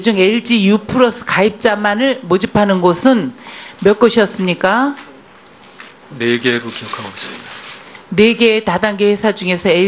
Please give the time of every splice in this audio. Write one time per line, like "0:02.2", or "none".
0:05.4